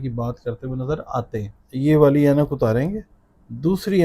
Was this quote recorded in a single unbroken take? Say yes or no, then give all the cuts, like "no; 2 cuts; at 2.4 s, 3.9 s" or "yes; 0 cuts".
no; 1 cut; at 1.6 s